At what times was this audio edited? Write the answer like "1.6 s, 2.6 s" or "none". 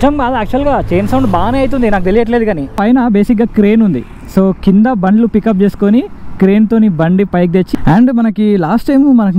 2.8 s, 7.7 s